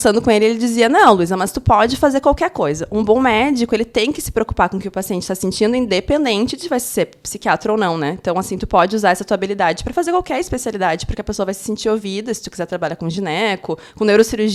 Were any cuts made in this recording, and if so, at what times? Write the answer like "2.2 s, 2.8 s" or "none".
none